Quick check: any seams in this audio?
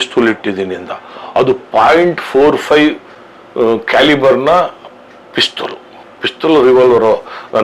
no; 0 cuts

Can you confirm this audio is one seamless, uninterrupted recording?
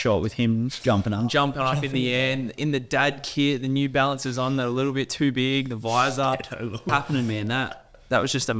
no; 1 cut; at 6.9 s

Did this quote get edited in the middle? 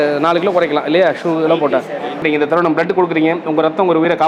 yes; 1 cut; at 2.2 s

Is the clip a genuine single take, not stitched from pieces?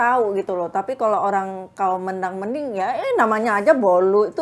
yes; 0 cuts

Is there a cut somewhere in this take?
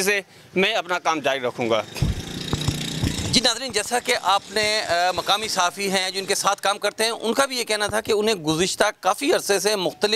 no; 0 cuts

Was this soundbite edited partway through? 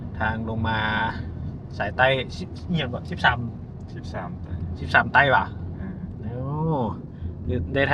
no; 0 cuts

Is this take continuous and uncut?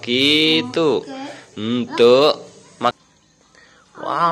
no; 1 cut; at 2.9 s

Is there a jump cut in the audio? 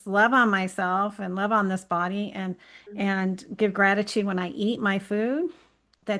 no; 0 cuts

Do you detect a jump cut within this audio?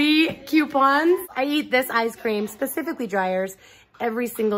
yes; 1 cut; at 1.3 s

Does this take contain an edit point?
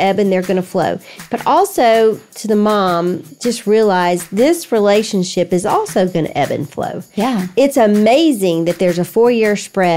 no; 0 cuts

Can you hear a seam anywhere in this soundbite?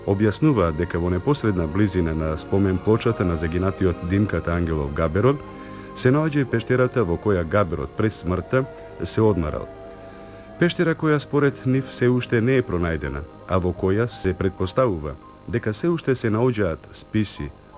no; 0 cuts

